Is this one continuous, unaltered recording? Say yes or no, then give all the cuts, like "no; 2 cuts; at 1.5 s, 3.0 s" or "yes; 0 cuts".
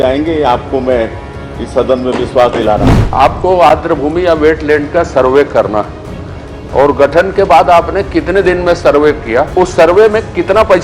no; 2 cuts; at 3.0 s, 9.5 s